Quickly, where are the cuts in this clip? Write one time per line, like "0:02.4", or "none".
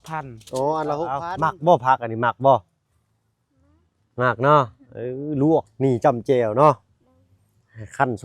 0:01.3